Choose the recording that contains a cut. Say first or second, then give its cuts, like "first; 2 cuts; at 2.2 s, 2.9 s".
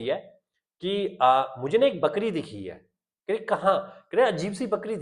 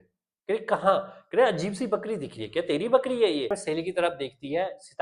second; 1 cut; at 3.6 s